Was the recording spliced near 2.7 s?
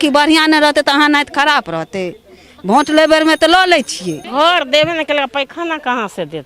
no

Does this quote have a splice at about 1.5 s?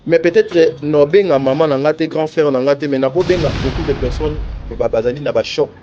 no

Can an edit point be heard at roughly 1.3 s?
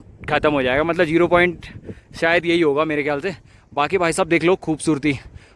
no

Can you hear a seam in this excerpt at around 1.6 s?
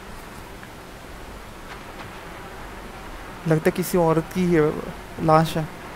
no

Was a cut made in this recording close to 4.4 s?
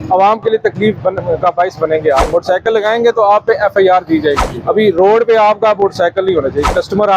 yes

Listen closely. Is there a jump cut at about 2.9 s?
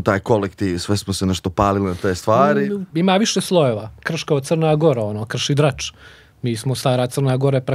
yes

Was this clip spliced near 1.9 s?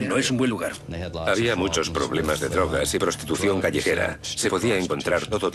yes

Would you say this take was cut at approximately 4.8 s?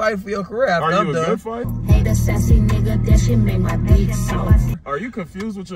yes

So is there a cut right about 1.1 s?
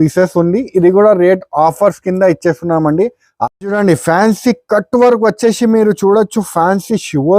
no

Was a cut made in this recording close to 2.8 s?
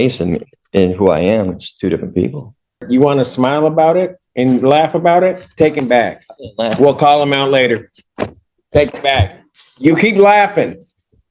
yes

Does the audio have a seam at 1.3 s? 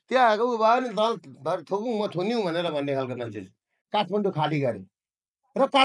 no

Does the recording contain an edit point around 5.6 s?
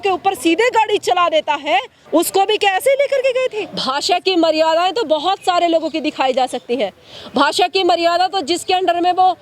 no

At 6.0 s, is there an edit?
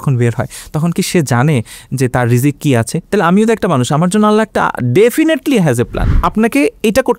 yes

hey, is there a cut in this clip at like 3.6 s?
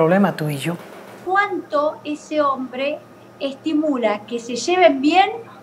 no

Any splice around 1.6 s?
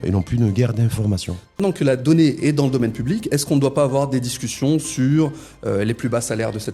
yes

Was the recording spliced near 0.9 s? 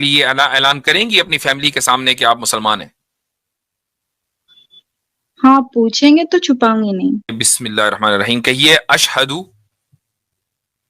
no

